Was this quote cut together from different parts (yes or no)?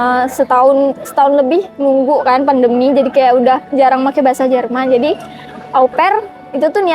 no